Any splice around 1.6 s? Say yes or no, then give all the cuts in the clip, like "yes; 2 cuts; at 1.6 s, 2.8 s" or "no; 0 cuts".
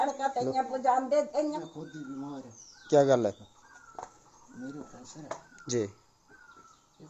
yes; 1 cut; at 1.6 s